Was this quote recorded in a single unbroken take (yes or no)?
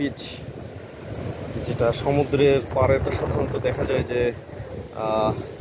yes